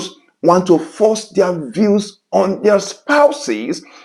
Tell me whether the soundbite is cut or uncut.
uncut